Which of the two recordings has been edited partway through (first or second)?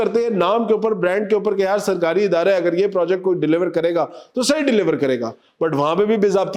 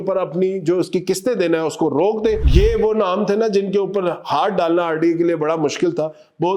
second